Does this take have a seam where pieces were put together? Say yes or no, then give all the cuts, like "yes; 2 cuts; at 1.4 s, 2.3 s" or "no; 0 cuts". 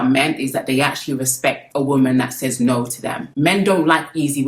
yes; 1 cut; at 3.2 s